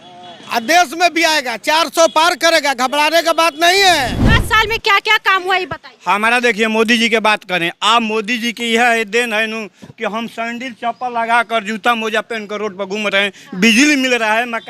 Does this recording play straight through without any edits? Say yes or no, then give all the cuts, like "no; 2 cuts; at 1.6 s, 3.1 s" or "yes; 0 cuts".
no; 1 cut; at 4.3 s